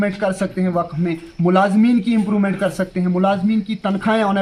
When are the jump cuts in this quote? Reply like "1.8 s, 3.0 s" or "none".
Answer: none

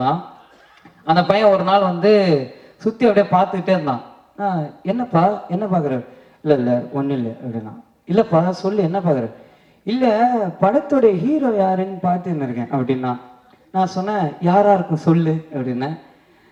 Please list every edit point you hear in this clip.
none

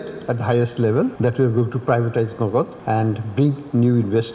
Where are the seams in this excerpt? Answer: 1.1 s, 2.8 s

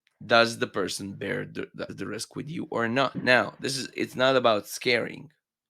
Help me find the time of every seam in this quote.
1.9 s, 3.2 s

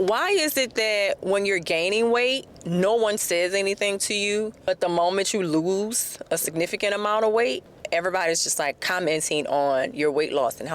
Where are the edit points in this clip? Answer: 2.5 s, 4.6 s, 7.7 s, 8.8 s

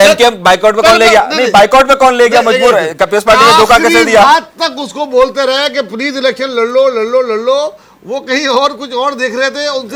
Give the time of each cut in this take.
none

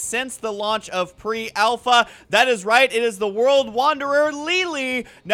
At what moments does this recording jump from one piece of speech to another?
4.4 s

